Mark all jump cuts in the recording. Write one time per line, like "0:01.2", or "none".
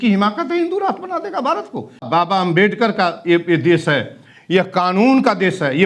0:02.0